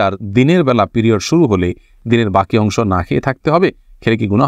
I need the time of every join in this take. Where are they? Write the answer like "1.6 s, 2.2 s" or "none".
none